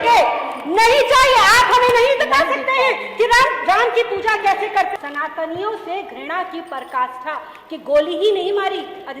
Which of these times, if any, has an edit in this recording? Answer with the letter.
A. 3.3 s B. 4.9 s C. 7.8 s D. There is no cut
B